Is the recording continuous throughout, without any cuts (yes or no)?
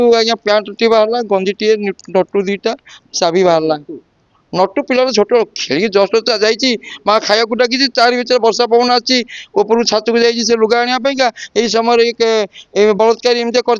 yes